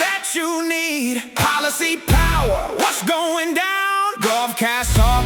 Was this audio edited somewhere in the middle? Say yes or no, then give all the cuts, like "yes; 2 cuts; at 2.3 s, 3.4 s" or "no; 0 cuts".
no; 0 cuts